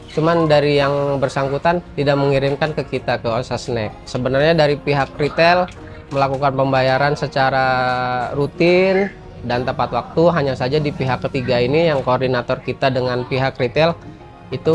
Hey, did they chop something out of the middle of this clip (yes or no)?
yes